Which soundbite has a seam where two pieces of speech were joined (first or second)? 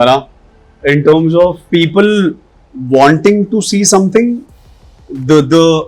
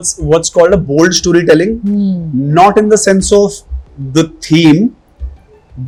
first